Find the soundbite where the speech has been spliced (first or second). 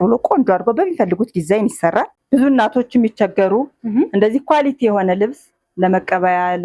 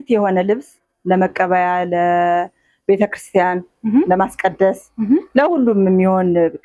first